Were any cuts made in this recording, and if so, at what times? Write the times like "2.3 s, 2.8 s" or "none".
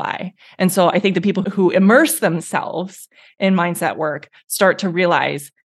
1.4 s